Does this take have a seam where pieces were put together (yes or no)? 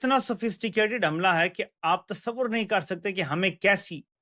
no